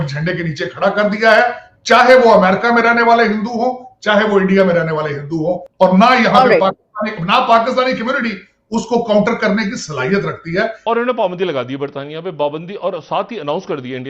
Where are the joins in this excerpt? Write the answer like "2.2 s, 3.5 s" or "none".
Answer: 5.6 s, 10.8 s

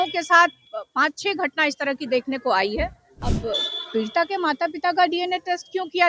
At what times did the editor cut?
3.1 s

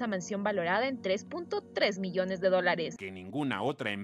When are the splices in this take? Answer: 2.9 s

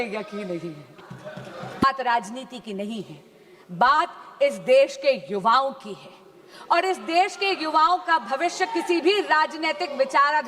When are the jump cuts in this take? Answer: 1.8 s

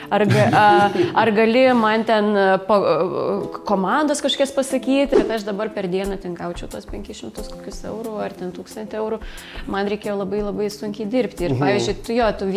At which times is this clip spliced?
5.1 s

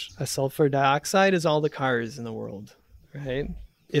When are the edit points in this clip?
none

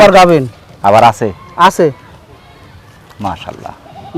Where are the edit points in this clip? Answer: none

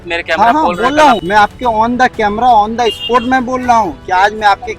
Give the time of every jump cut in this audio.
1.2 s

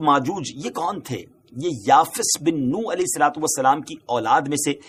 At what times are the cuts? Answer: none

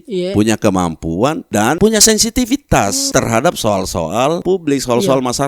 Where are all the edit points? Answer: 1.6 s, 3.1 s, 4.4 s

